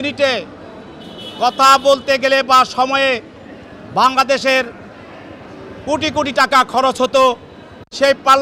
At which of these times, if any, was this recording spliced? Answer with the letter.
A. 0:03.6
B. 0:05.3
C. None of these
C